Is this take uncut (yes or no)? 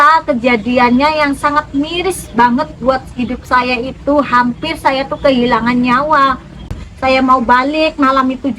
no